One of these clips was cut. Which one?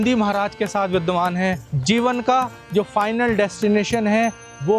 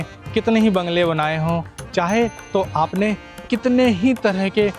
first; 1 cut; at 1.7 s

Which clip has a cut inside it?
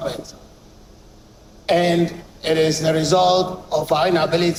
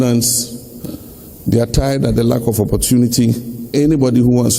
second; 1 cut; at 3.6 s

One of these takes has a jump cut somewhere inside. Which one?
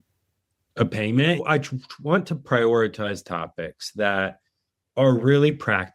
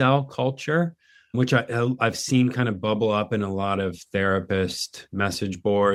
first; 1 cut; at 1.4 s

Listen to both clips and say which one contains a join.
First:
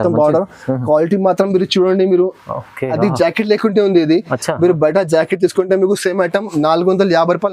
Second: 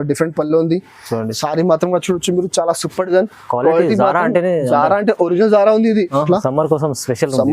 second; 1 cut; at 6.3 s

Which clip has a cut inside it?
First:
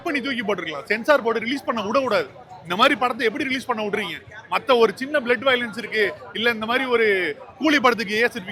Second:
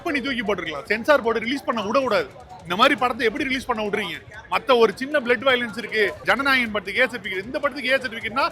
second; 1 cut; at 6.2 s

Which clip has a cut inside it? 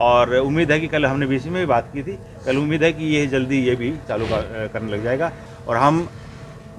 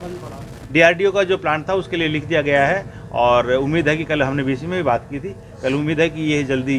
first; 1 cut; at 5.5 s

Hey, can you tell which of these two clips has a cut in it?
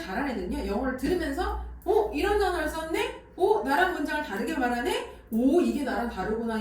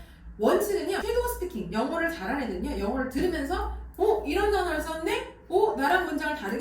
second; 1 cut; at 1.0 s

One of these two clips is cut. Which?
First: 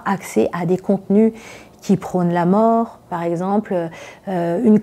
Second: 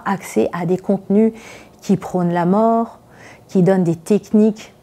first; 1 cut; at 3.1 s

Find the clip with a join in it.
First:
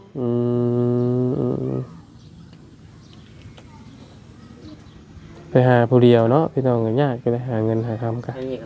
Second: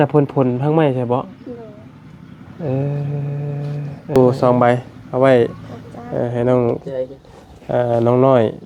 second; 1 cut; at 4.2 s

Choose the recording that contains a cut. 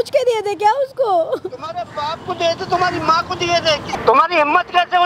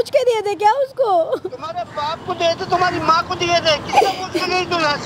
first; 1 cut; at 3.9 s

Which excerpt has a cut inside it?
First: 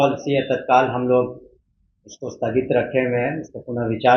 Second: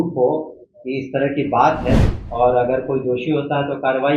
second; 1 cut; at 2.0 s

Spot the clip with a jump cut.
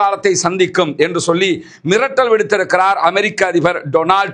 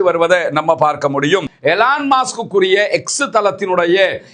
second; 1 cut; at 1.5 s

